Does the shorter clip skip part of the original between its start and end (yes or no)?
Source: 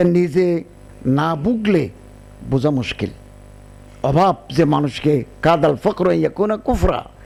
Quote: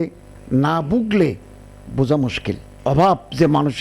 yes